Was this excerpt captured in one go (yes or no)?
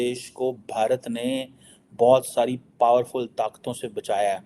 yes